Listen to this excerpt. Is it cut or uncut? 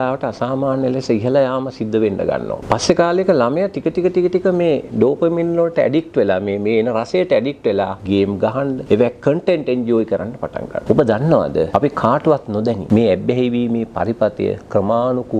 cut